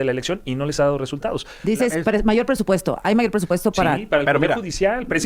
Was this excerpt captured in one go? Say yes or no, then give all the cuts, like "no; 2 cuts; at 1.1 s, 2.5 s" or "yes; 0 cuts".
no; 1 cut; at 1.5 s